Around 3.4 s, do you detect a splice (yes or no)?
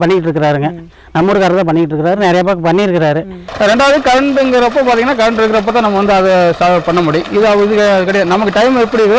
yes